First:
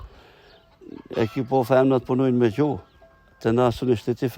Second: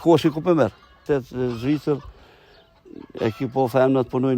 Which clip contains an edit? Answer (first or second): second